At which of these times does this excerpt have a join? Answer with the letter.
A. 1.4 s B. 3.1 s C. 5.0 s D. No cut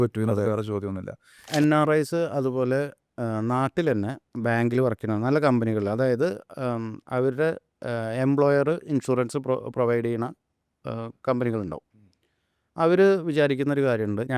A